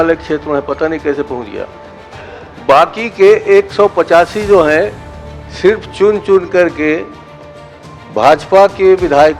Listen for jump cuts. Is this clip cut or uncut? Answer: uncut